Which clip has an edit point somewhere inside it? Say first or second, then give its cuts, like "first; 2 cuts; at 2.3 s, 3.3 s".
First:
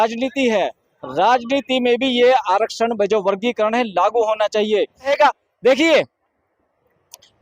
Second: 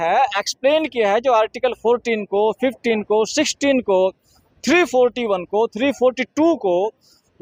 first; 1 cut; at 5.1 s